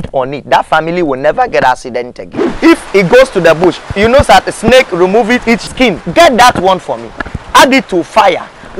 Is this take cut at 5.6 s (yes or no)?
yes